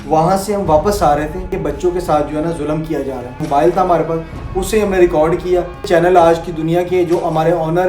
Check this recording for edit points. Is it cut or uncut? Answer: cut